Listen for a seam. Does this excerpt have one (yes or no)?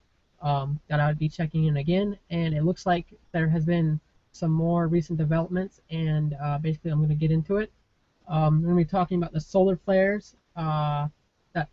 yes